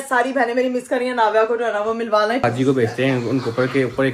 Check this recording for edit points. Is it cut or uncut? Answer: cut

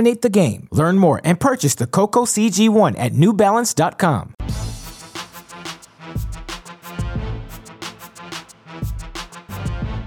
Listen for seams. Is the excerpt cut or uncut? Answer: cut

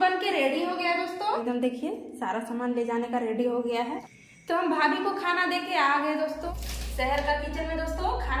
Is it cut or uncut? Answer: cut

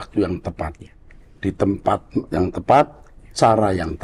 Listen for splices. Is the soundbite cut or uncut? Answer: uncut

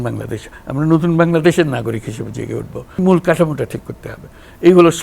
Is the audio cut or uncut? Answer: cut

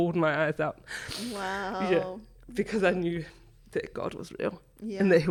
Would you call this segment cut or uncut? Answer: uncut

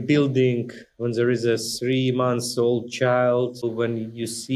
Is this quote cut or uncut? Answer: cut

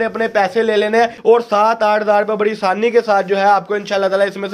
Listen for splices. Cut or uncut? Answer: cut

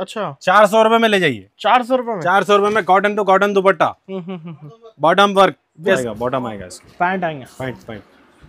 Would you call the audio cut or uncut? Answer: cut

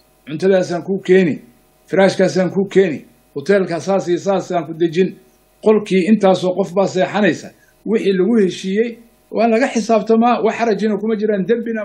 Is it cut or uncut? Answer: uncut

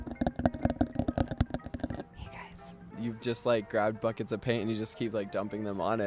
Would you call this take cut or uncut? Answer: cut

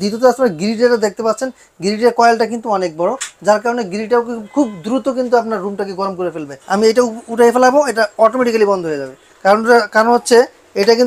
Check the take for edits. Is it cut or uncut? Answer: cut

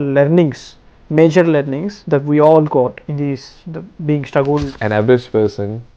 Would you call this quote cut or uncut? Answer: cut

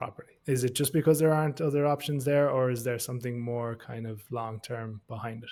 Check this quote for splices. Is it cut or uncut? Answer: uncut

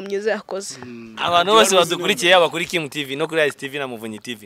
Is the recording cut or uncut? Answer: uncut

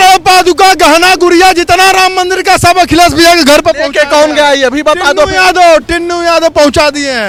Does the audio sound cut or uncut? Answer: uncut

